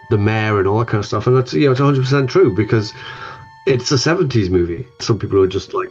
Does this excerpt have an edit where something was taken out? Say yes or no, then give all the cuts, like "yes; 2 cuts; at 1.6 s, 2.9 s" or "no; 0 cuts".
yes; 1 cut; at 4.9 s